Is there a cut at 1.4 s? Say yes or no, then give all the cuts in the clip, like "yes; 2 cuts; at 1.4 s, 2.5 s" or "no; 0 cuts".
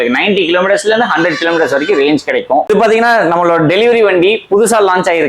no; 1 cut; at 2.7 s